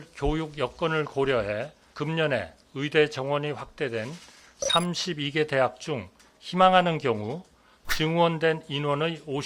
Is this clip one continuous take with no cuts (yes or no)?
no